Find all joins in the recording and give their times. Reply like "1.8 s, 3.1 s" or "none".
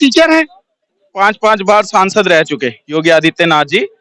1.0 s